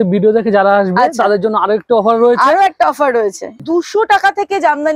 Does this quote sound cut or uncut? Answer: cut